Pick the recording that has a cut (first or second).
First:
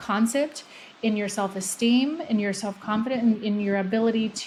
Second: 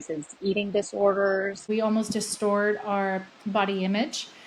second